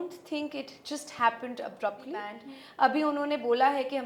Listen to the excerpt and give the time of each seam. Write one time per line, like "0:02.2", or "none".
0:02.3